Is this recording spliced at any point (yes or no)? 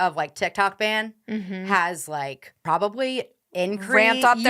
yes